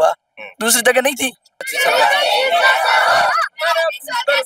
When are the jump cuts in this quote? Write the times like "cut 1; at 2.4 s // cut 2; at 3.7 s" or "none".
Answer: cut 1; at 1.7 s